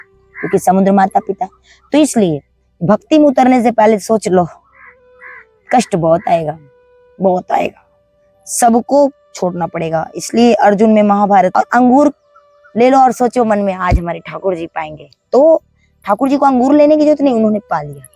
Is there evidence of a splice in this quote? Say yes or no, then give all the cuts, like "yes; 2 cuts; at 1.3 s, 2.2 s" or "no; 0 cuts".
yes; 1 cut; at 11.5 s